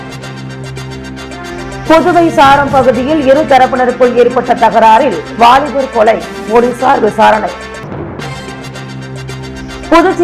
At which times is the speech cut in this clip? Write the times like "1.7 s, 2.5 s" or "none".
1.2 s